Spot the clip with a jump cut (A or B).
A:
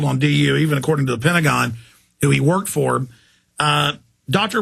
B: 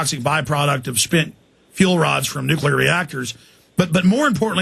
B